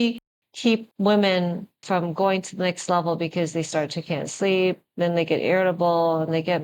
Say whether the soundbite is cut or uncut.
cut